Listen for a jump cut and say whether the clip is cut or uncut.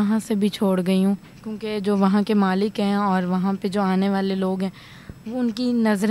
uncut